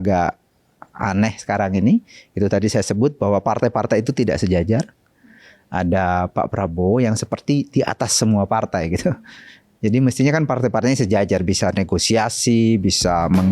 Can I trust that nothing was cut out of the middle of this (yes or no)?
yes